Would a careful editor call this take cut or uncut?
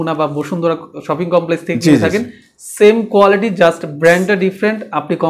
uncut